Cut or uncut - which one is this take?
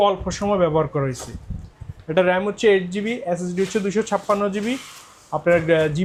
uncut